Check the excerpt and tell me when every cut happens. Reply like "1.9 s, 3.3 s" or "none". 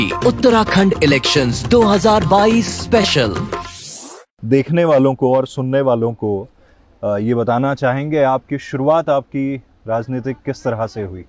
none